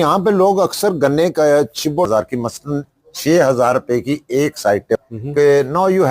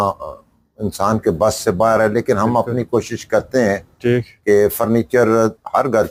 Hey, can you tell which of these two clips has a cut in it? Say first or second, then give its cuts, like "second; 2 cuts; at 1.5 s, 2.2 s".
first; 2 cuts; at 2.1 s, 5.0 s